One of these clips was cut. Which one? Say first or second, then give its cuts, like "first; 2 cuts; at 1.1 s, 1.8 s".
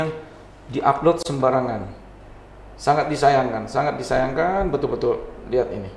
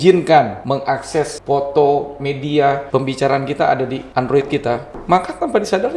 second; 3 cuts; at 0.9 s, 2.8 s, 4.6 s